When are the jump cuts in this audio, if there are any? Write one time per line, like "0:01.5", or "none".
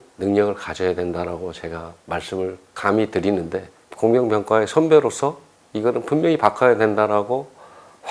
0:03.8